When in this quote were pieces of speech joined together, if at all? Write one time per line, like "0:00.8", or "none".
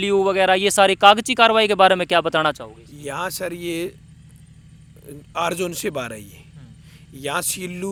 none